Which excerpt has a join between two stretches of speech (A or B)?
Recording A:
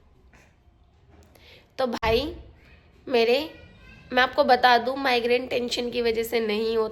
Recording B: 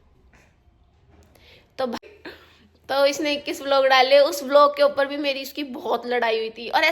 B